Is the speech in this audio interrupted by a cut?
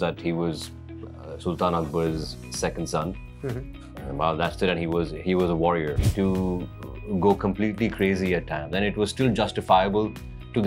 yes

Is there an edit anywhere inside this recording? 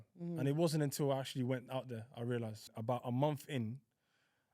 yes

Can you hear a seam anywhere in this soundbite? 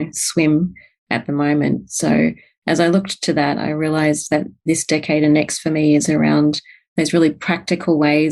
yes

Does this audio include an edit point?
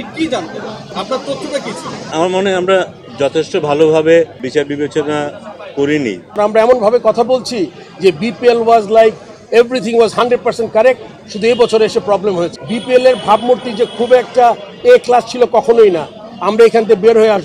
yes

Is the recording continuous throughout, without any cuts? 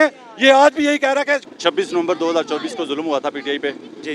no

